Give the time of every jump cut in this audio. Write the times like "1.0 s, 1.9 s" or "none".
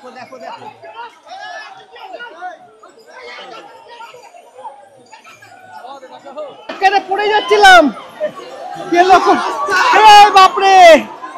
6.8 s